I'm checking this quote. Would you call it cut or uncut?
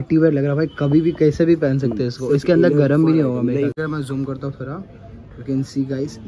cut